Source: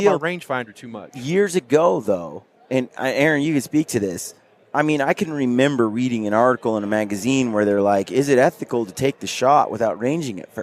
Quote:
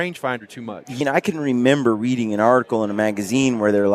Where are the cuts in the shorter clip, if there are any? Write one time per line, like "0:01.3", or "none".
0:01.0